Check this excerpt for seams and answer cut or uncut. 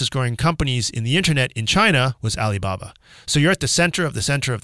cut